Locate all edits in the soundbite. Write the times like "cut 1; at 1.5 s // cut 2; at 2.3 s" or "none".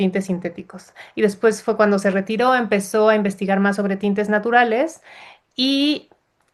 none